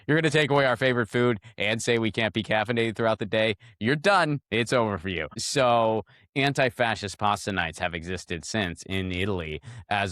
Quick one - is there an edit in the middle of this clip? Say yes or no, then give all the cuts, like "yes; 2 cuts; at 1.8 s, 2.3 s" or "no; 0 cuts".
yes; 1 cut; at 5.4 s